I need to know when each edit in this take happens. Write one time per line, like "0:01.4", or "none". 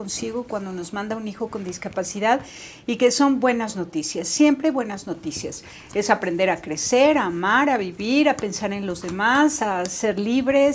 none